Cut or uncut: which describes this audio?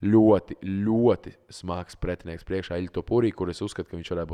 uncut